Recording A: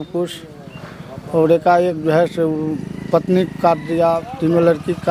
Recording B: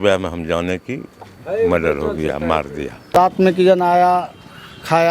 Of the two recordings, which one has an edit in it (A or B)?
B